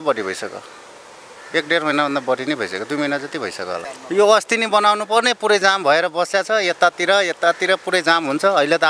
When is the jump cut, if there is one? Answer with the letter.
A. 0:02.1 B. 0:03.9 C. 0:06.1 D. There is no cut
B